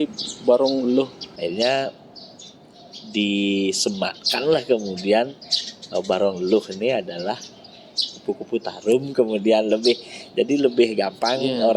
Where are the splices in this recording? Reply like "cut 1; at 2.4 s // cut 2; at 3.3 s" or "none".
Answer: cut 1; at 1.2 s

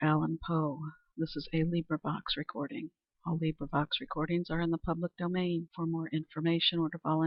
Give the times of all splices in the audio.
none

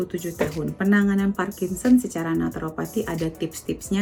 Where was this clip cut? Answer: none

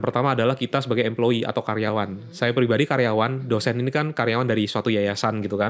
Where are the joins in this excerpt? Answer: none

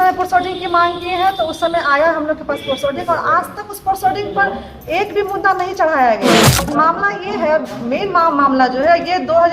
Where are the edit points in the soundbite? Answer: cut 1; at 6.7 s

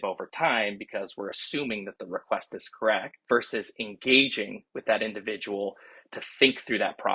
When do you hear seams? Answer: cut 1; at 3.1 s

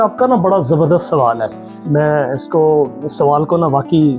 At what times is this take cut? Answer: none

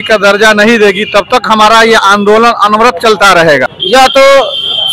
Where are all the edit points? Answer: cut 1; at 3.8 s

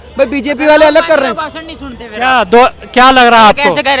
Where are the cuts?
none

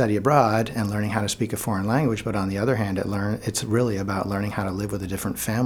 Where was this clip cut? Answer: none

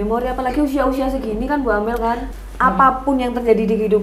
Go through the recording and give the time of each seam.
cut 1; at 2.3 s

